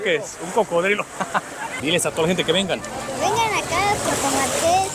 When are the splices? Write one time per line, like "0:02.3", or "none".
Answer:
0:01.7